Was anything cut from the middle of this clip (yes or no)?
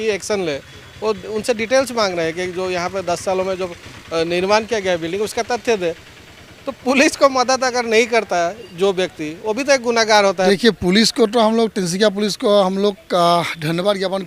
yes